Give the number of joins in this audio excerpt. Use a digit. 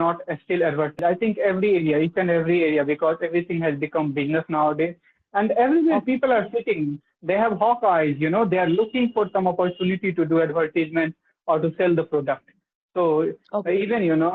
1